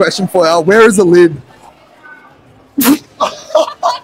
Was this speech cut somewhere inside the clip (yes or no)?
no